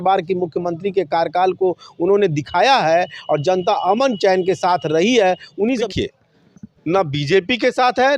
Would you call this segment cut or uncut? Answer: cut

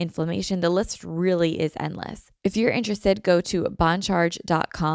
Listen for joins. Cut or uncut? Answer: cut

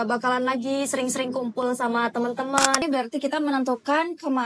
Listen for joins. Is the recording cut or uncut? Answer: cut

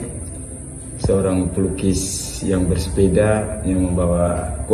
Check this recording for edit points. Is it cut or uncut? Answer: uncut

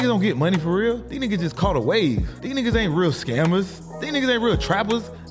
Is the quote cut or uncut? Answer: cut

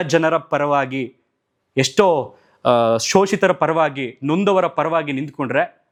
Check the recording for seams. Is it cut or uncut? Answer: uncut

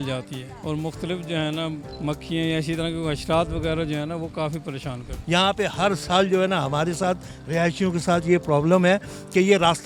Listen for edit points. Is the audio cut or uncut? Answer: cut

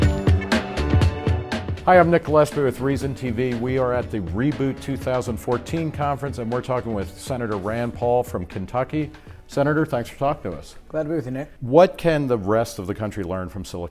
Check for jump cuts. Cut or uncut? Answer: uncut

